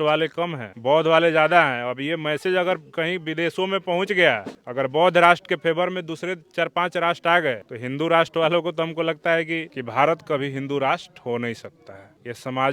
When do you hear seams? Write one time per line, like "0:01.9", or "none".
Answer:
0:09.6